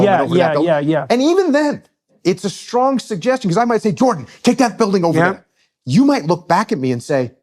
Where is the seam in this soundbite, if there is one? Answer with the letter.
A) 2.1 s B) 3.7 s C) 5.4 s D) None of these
A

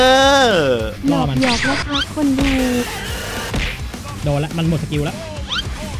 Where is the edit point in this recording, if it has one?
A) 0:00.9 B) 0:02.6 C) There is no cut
A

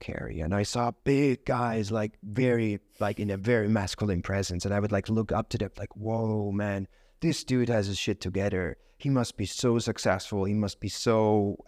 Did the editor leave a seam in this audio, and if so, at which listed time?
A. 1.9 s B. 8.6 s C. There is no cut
C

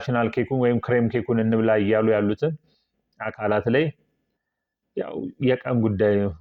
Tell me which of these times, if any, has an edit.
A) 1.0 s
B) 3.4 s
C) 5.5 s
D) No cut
D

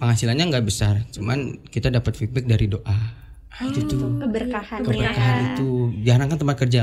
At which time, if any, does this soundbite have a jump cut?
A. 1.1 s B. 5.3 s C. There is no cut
C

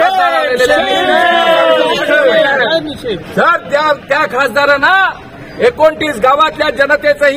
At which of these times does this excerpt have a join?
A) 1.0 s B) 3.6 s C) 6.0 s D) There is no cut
D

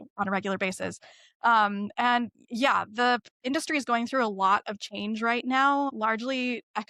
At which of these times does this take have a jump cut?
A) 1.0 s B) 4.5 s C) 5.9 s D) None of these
C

